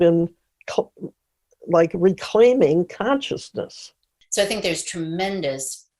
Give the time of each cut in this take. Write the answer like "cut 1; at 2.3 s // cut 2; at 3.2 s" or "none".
cut 1; at 4.2 s